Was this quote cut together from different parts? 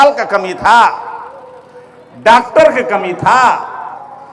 no; 0 cuts

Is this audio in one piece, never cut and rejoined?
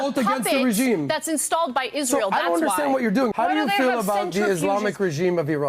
no; 1 cut; at 3.3 s

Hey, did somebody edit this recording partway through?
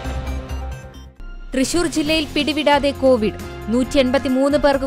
yes; 1 cut; at 1.0 s

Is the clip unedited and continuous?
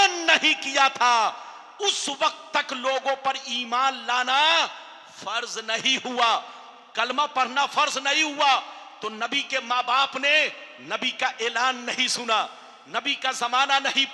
yes; 0 cuts

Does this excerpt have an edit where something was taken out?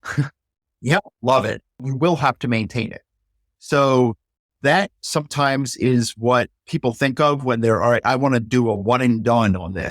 yes; 1 cut; at 1.8 s

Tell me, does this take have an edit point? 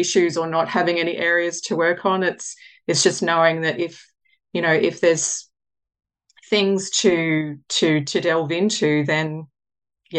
no; 0 cuts

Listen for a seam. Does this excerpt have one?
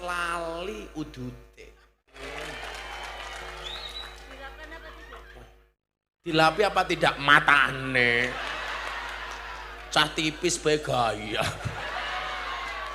yes; 1 cut; at 2.2 s

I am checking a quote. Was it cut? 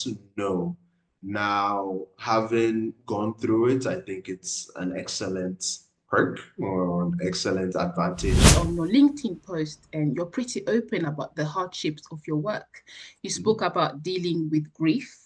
yes; 1 cut; at 8.5 s

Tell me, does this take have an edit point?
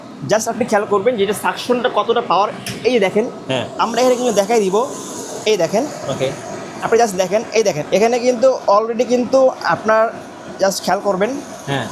no; 0 cuts

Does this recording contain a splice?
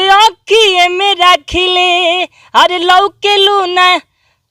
no; 0 cuts

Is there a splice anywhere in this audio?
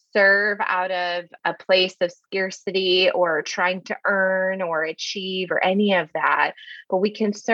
yes; 1 cut; at 1.3 s

